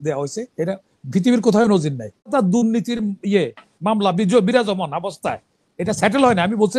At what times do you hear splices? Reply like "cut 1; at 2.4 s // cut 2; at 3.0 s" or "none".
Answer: cut 1; at 2.3 s